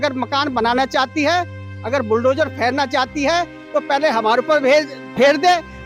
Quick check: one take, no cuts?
yes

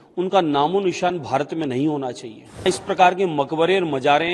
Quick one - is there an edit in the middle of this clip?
yes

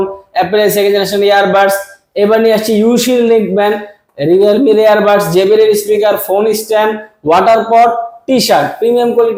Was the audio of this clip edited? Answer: no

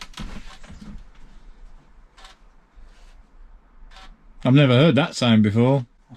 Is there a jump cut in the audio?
no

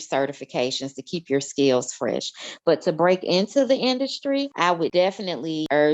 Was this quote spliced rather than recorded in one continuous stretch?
yes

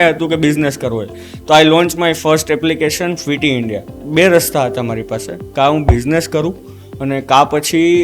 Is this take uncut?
no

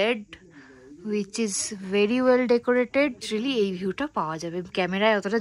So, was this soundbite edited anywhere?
yes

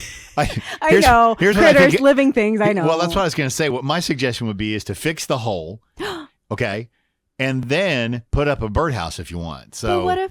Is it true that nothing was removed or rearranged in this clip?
yes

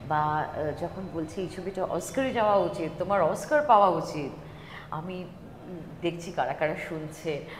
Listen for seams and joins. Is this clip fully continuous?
yes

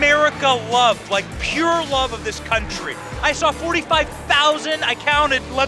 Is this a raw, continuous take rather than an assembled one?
yes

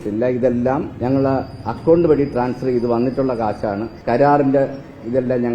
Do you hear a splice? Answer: yes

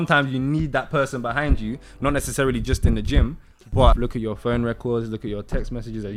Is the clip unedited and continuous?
no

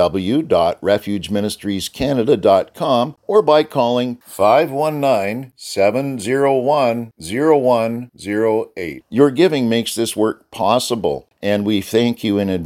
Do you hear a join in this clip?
yes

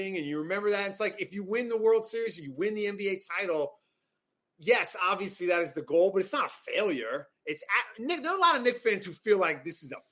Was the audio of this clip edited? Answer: no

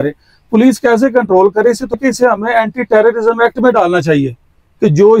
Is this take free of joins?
no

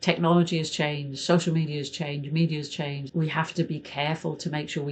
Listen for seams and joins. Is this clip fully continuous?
no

